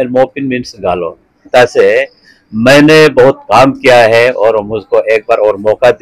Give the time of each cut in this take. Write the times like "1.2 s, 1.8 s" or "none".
1.5 s